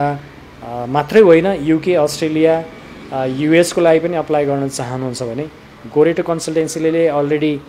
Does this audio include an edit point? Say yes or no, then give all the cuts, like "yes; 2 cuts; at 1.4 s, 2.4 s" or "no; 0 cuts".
no; 0 cuts